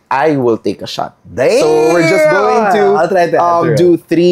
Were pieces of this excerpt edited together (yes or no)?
no